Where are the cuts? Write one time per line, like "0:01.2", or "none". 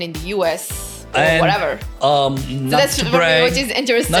none